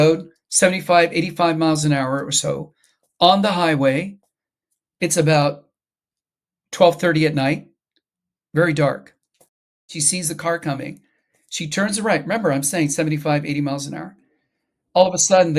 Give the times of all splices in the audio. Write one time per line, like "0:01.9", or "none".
0:10.0